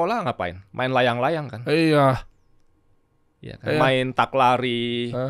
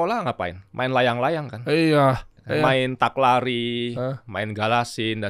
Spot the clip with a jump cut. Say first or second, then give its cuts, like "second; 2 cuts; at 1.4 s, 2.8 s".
second; 1 cut; at 2.3 s